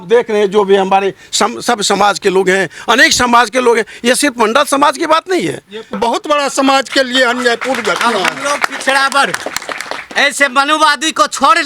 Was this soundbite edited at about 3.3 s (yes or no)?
no